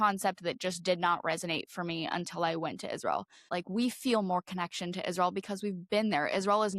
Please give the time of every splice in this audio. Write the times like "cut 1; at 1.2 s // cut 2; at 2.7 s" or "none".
cut 1; at 3.5 s